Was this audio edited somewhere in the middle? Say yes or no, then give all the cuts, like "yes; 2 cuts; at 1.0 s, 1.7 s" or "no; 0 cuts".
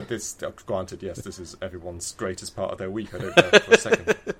yes; 1 cut; at 3.3 s